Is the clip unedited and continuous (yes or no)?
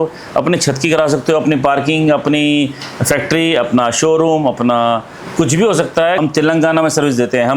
no